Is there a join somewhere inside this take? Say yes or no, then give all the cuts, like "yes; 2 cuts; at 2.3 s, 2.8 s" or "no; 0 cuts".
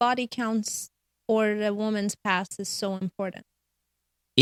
no; 0 cuts